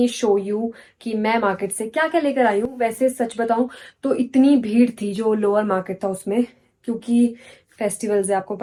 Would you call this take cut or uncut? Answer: uncut